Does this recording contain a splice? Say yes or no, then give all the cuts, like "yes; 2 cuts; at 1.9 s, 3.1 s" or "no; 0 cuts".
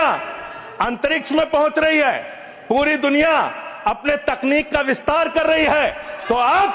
no; 0 cuts